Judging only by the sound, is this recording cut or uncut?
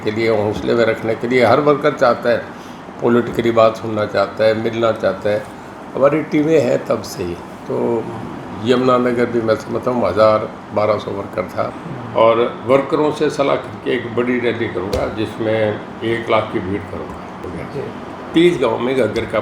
cut